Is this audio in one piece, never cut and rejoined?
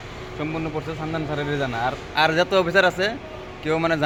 yes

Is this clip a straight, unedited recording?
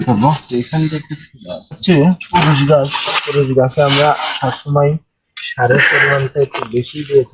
no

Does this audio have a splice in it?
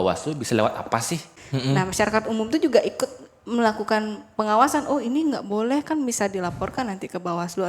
yes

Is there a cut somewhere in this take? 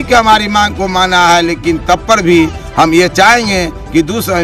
no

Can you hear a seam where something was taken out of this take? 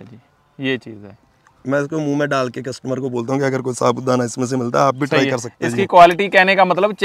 no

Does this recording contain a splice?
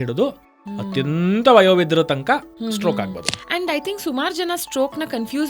yes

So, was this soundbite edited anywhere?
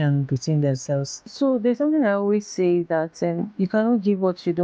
yes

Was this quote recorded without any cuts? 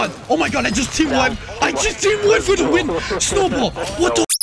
yes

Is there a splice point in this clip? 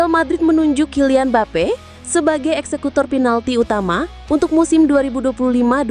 no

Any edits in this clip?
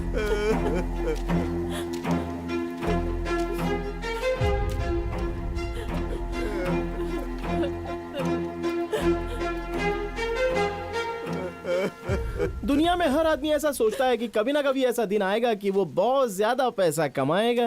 no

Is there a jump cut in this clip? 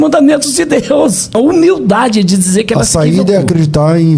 yes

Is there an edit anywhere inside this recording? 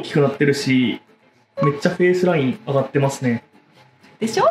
no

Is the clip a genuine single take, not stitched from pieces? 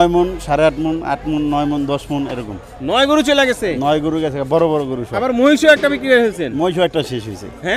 yes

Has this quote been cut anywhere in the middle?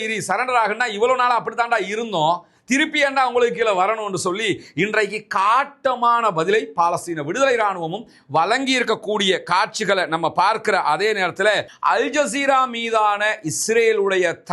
yes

